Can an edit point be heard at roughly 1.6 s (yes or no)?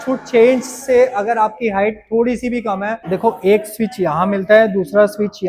no